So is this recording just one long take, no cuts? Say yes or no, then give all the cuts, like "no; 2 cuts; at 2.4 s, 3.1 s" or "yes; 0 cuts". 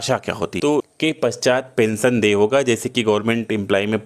no; 1 cut; at 0.9 s